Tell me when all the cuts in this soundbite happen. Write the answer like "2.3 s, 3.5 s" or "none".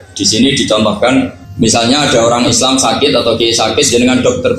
1.4 s